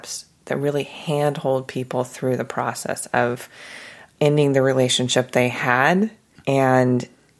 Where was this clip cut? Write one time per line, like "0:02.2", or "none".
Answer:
0:04.1
0:06.3

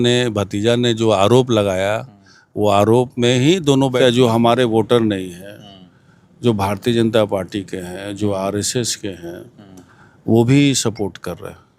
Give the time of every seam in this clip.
0:03.9

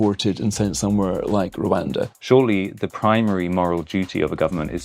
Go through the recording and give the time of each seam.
0:02.1

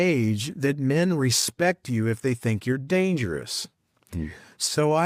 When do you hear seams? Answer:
none

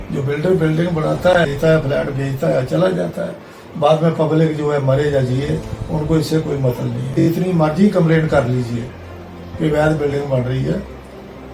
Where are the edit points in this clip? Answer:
0:01.5
0:07.2

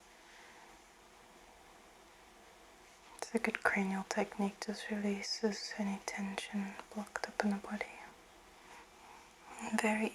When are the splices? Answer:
0:03.0
0:08.8

